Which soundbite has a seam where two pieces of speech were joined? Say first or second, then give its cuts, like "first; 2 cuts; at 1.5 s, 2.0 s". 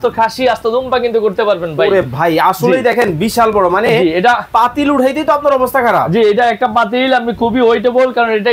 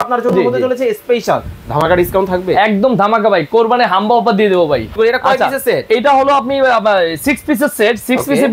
second; 1 cut; at 4.9 s